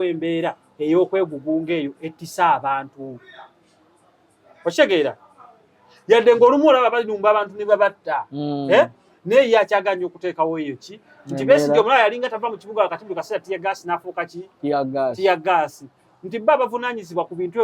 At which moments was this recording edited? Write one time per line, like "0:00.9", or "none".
none